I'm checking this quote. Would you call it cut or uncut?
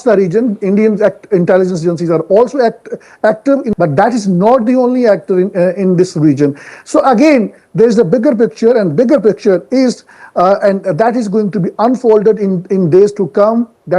cut